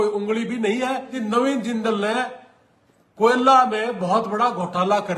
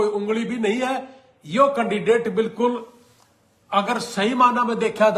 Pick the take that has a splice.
first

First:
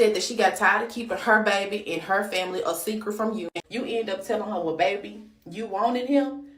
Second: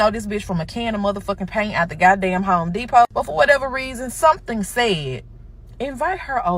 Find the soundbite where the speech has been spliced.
first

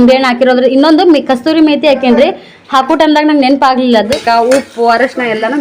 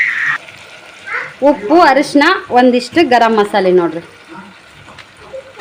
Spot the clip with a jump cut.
first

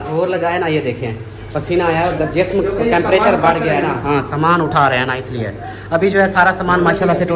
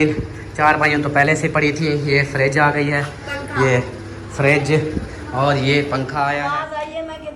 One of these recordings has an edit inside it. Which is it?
second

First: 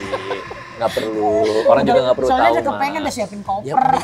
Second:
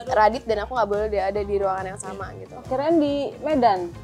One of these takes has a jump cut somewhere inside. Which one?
second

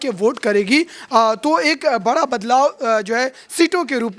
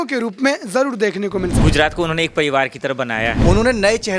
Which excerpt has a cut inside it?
second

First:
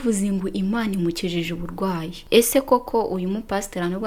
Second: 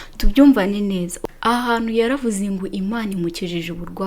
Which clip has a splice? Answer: second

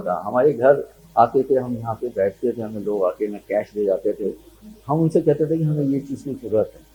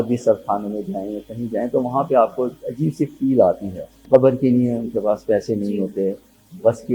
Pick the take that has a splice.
second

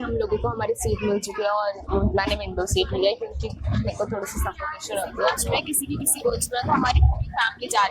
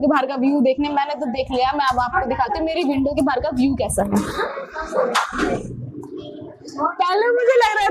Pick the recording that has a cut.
first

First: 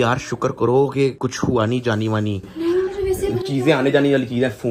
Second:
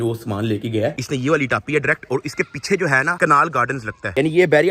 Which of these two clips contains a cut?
second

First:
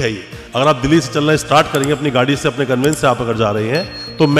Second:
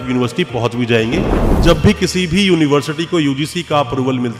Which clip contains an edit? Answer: second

